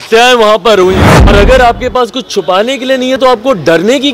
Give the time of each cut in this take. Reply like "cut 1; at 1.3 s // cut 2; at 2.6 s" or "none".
cut 1; at 1.2 s